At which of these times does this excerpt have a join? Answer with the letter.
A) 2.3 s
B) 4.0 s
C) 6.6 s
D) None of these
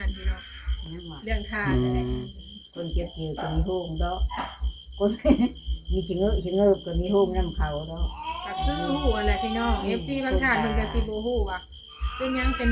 A